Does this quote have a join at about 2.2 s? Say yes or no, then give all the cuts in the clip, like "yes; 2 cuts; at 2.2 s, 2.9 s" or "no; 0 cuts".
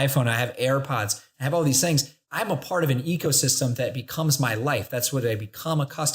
yes; 1 cut; at 2.2 s